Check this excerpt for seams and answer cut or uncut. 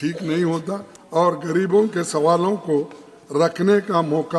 cut